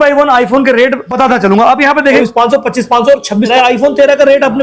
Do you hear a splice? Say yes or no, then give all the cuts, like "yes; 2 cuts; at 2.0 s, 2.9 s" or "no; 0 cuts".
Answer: yes; 3 cuts; at 1.1 s, 2.2 s, 3.5 s